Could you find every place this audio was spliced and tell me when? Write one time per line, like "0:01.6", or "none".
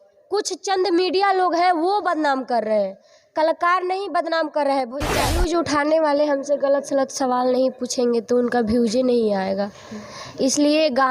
0:05.4